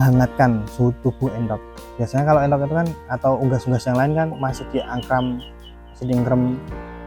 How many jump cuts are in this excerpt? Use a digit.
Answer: 0